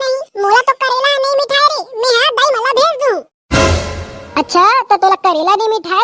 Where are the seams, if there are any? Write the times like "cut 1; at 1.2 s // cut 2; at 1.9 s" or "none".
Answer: cut 1; at 3.3 s